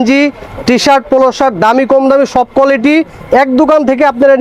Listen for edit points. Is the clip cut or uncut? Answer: uncut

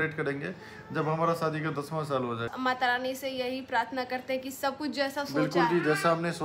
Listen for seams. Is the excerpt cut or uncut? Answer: cut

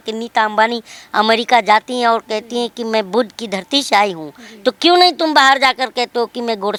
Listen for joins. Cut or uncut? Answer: uncut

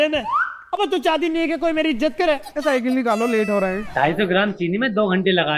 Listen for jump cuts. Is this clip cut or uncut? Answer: cut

